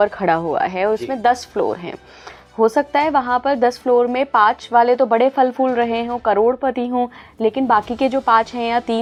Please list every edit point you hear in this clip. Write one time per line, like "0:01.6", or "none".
none